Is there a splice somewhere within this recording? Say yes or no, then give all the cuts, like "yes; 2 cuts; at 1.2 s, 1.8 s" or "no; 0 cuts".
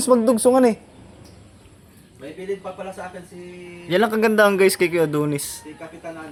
no; 0 cuts